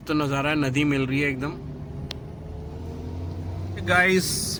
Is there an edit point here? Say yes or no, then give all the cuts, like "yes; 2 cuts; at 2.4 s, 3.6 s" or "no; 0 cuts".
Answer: no; 0 cuts